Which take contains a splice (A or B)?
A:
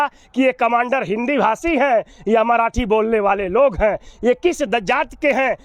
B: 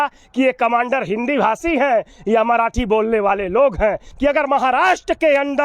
B